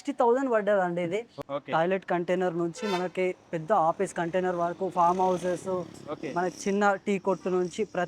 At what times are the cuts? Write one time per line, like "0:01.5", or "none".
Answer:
0:01.4